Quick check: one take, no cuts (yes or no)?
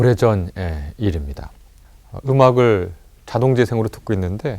no